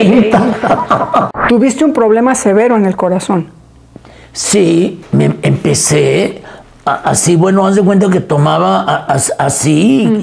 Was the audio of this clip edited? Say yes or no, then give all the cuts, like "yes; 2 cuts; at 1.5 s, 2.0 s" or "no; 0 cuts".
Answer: yes; 2 cuts; at 1.3 s, 5.0 s